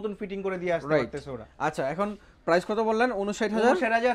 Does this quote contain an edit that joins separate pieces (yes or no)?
no